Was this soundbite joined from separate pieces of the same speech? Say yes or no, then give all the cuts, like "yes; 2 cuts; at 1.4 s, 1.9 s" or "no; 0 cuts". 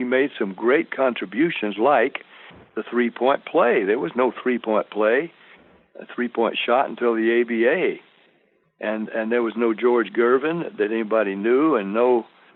no; 0 cuts